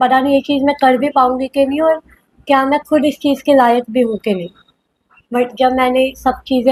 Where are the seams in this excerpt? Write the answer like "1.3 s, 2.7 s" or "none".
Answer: none